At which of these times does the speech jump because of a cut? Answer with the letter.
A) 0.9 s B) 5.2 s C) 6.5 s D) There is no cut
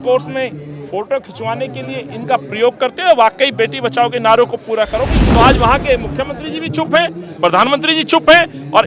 B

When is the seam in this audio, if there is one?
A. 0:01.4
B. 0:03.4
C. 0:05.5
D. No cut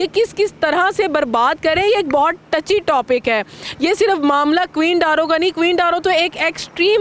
D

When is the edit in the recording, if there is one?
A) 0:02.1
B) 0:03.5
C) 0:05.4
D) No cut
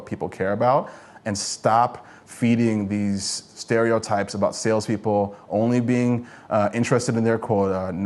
B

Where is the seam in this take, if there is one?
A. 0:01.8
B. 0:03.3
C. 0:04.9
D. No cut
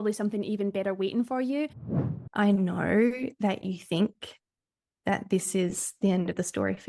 A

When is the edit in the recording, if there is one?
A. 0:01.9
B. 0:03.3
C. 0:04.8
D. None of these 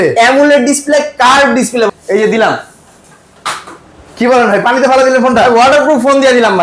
A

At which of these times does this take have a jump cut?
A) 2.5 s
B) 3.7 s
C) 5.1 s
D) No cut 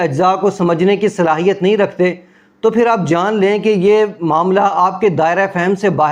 D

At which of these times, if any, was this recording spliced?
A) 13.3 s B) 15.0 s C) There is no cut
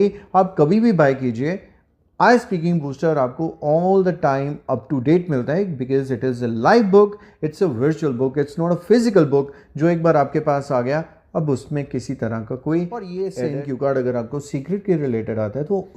A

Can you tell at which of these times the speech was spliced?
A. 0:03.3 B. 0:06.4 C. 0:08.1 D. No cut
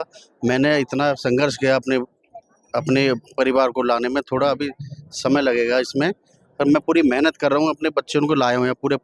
D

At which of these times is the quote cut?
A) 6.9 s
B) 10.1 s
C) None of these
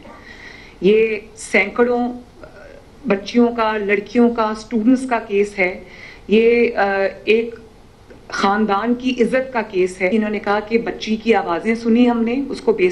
B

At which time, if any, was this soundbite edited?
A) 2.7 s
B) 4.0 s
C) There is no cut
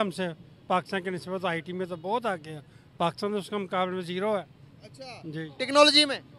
C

